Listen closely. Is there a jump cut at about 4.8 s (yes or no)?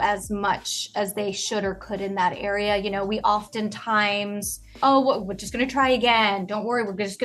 yes